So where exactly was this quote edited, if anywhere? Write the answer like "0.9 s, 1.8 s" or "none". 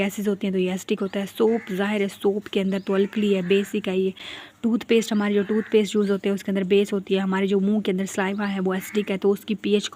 none